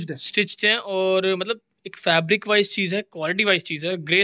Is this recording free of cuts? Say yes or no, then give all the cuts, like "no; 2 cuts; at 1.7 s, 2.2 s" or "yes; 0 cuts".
yes; 0 cuts